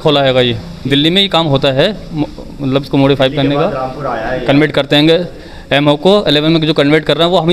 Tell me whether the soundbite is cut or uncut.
uncut